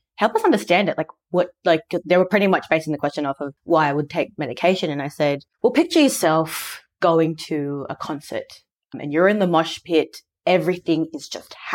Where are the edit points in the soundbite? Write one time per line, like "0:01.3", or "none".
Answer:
0:03.5
0:05.5